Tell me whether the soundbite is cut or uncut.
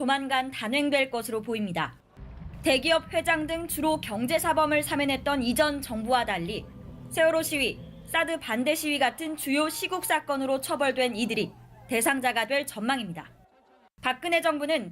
cut